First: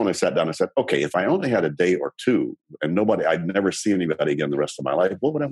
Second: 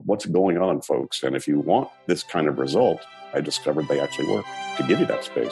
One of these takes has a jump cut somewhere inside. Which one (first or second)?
second